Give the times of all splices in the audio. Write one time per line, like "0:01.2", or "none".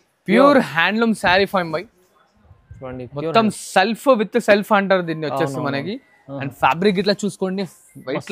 none